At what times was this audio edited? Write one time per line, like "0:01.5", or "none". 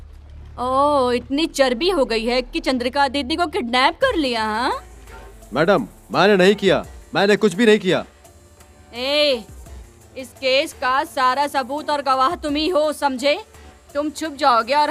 none